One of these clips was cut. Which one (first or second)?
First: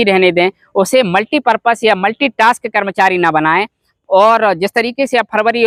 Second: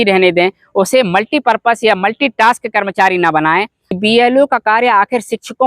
second